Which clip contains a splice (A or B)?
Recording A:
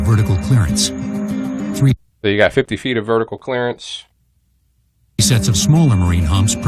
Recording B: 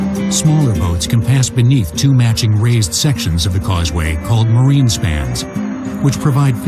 A